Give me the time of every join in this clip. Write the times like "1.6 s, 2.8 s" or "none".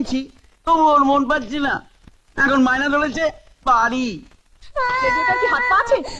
none